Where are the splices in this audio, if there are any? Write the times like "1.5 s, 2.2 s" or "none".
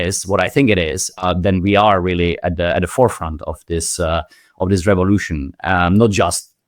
1.0 s